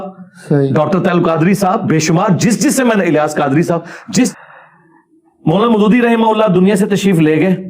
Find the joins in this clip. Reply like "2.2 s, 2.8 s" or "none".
4.3 s